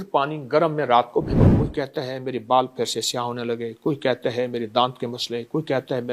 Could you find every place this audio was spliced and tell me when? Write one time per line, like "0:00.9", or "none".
0:01.5

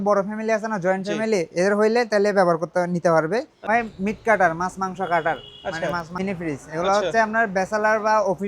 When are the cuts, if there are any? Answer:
0:03.6
0:06.1

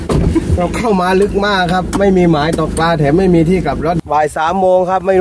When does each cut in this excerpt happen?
0:04.0

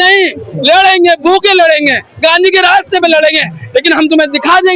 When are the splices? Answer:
none

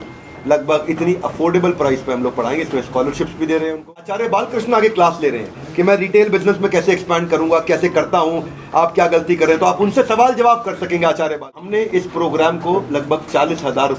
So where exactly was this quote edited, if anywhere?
0:04.2
0:11.8

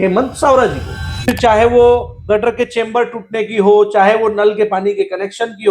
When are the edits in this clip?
0:01.4

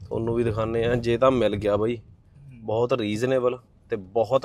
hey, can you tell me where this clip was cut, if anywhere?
none

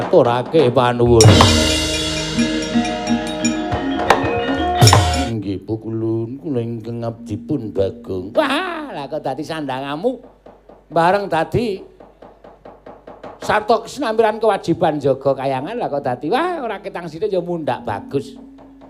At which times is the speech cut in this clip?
0:05.1

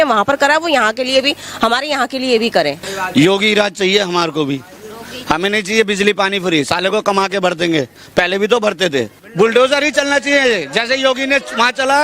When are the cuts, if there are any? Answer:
0:02.8
0:09.2

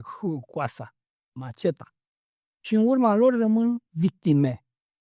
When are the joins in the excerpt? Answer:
none

